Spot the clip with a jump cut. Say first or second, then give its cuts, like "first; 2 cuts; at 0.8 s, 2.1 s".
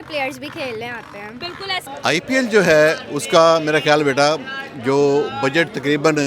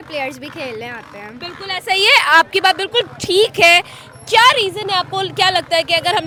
first; 1 cut; at 1.8 s